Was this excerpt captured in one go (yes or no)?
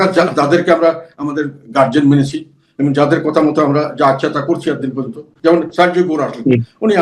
no